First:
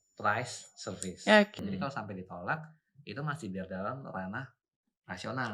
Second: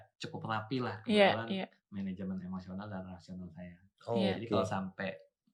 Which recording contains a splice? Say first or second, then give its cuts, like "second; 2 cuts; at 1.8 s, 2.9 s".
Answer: first; 1 cut; at 1.6 s